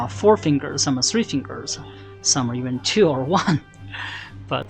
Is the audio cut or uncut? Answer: uncut